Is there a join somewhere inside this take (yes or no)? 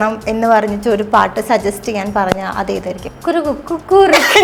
yes